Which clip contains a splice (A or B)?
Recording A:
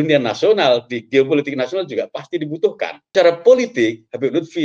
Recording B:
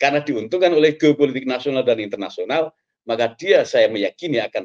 A